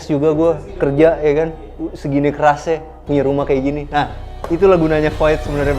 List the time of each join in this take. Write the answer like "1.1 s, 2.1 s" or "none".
none